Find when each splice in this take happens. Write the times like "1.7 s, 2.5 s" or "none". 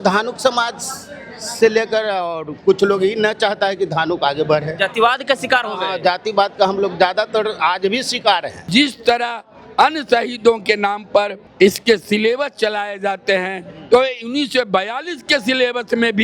8.7 s, 11.4 s